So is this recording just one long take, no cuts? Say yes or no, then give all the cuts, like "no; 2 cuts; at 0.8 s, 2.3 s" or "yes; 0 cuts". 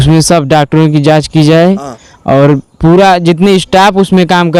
yes; 0 cuts